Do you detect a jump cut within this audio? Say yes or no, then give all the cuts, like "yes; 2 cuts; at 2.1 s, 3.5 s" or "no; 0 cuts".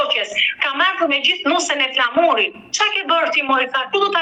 no; 0 cuts